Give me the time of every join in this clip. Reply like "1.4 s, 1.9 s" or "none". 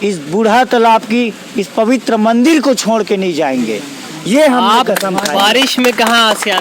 none